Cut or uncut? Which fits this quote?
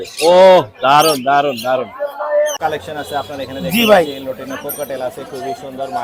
cut